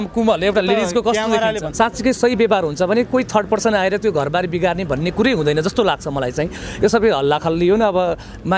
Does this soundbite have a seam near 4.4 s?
no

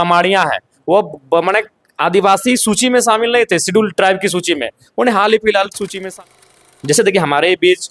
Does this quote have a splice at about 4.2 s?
no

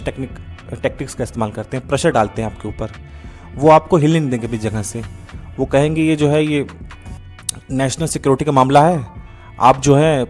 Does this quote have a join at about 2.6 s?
no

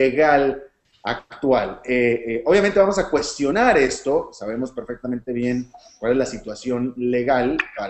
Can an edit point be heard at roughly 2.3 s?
no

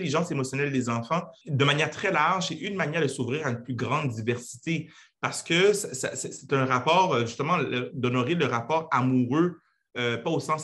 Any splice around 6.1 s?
no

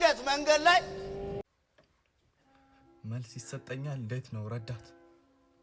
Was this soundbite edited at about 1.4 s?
yes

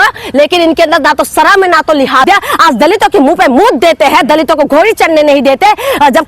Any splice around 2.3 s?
yes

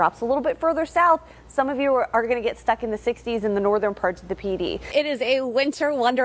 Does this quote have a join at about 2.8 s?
no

